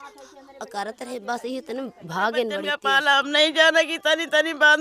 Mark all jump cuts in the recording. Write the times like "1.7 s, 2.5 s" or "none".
2.7 s